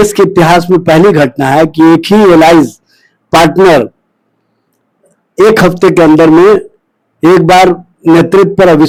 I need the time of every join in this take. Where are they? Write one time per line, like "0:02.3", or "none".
none

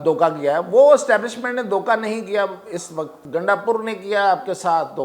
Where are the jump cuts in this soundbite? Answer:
0:03.2

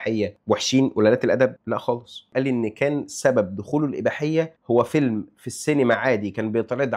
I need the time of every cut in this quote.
0:02.3

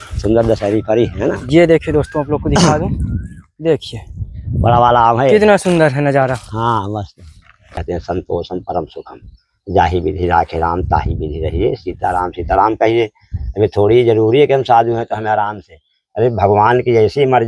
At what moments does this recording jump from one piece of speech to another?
0:07.5

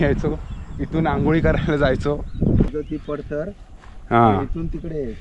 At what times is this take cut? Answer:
0:02.7

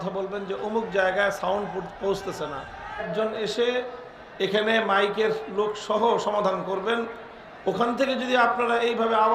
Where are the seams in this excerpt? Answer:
0:03.1

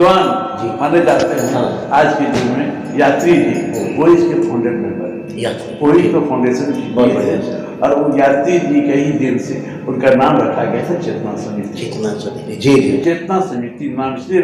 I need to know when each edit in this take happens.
0:13.0

